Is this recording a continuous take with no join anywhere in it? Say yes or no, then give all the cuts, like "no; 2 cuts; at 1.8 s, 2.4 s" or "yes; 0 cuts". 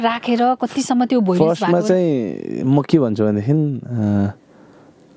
yes; 0 cuts